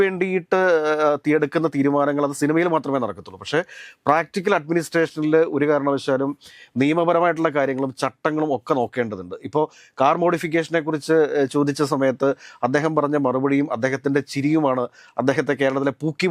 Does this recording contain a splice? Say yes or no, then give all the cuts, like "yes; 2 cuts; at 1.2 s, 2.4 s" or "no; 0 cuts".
no; 0 cuts